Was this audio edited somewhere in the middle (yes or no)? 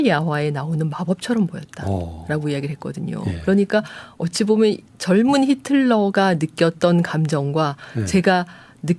no